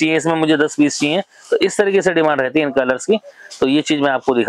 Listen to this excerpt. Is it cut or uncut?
uncut